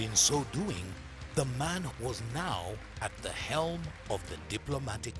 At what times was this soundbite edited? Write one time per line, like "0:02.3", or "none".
0:01.9